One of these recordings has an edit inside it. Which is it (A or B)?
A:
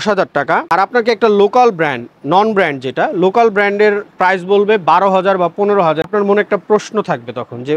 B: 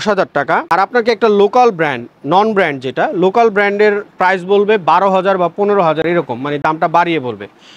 A